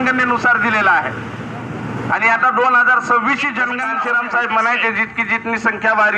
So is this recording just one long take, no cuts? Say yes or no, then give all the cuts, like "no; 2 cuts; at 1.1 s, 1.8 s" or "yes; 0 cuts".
no; 1 cut; at 3.9 s